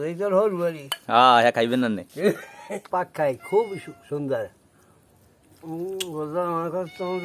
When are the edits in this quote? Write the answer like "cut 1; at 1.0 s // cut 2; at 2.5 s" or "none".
cut 1; at 2.9 s

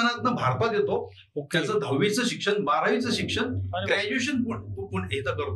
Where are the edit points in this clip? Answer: none

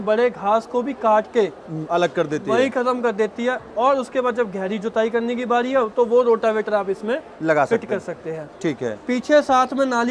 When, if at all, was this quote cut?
none

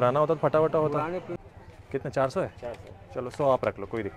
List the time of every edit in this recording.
cut 1; at 1.4 s

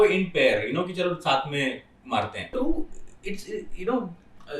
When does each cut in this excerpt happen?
cut 1; at 2.5 s

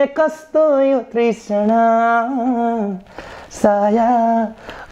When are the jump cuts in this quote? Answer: none

